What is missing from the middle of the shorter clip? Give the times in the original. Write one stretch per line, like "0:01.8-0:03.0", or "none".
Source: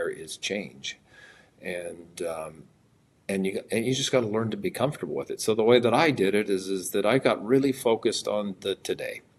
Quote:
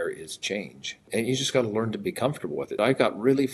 0:01.1-0:03.7
0:05.3-0:07.0

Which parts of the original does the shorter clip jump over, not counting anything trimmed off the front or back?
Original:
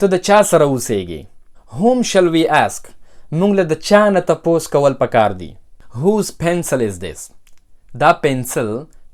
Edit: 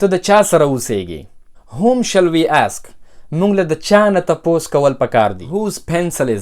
0:05.5-0:06.0

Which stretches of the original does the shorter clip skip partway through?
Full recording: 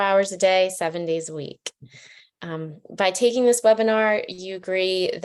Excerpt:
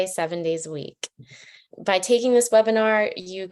0:02.3-0:02.8

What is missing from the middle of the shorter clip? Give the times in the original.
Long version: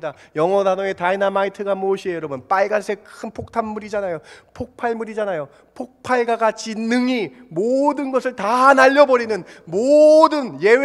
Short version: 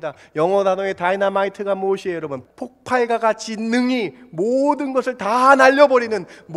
0:02.4-0:05.6

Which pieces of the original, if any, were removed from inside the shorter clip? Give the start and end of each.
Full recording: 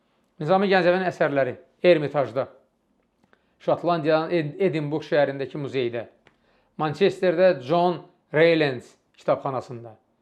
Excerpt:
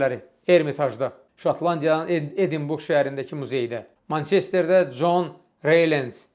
0:02.6-0:03.5
0:06.1-0:06.6

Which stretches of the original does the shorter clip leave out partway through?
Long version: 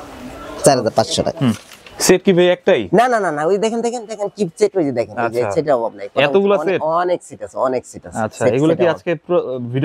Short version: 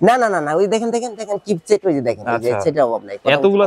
none

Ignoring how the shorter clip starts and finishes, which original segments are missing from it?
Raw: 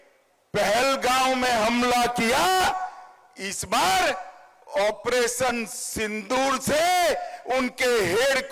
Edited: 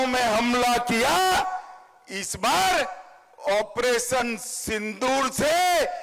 none

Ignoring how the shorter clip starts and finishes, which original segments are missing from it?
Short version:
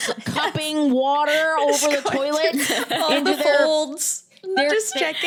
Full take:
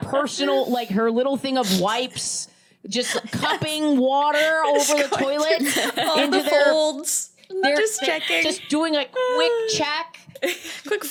none

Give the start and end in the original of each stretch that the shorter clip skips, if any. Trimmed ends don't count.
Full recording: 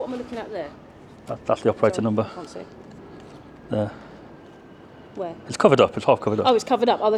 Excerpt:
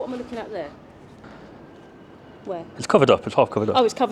0:01.2-0:03.9

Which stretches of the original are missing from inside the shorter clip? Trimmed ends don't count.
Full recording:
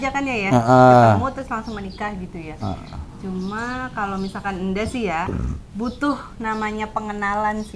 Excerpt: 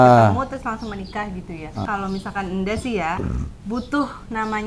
0:02.7-0:04.0

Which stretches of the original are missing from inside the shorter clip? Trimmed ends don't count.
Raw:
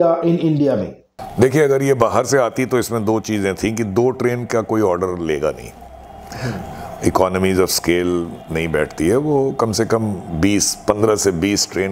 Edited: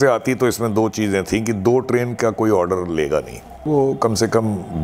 0:06.0-0:09.2

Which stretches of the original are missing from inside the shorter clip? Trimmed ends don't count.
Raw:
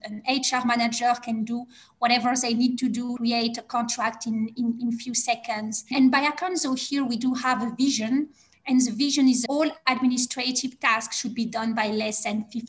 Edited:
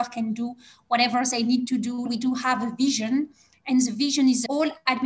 0:03.2-0:07.1

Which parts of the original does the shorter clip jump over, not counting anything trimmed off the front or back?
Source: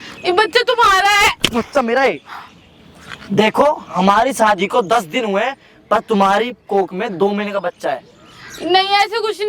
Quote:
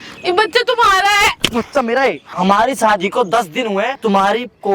0:02.3-0:03.9
0:05.6-0:06.0

